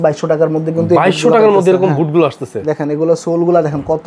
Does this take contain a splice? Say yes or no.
no